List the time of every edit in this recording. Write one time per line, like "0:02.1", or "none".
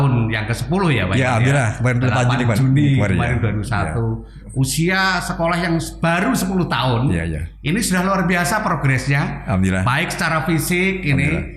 none